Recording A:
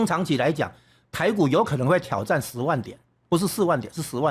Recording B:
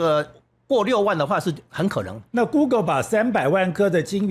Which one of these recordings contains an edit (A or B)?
B